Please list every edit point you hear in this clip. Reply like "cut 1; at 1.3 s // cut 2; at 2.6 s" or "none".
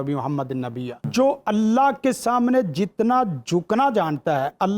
cut 1; at 1.1 s